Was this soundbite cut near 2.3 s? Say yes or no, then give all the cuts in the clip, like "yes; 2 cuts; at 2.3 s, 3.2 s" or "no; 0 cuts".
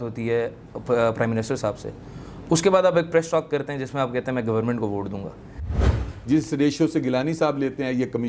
no; 1 cut; at 5.8 s